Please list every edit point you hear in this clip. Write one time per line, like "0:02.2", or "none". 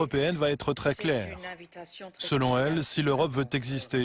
none